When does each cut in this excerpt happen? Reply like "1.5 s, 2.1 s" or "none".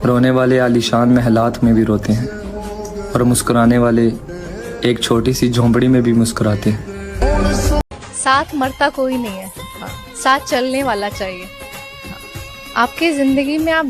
7.9 s